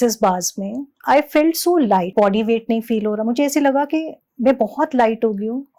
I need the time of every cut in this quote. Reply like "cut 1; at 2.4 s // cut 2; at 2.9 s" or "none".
cut 1; at 0.9 s // cut 2; at 2.1 s